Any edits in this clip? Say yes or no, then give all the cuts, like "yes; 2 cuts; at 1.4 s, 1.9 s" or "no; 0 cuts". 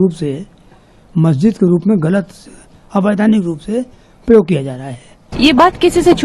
yes; 1 cut; at 5.2 s